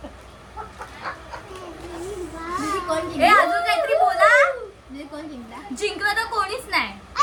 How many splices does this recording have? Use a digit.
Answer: 0